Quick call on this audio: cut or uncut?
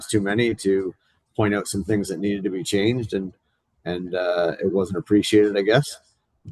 uncut